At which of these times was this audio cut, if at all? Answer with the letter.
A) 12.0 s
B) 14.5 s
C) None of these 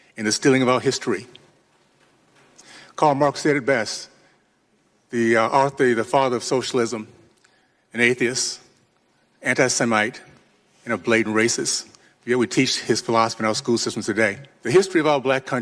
B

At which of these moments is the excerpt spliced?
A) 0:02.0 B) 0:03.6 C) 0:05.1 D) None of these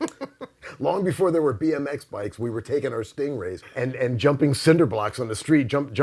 B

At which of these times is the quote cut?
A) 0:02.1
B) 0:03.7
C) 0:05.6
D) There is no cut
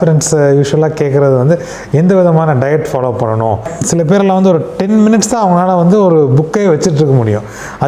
B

